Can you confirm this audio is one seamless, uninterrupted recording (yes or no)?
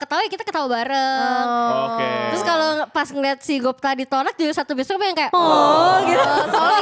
yes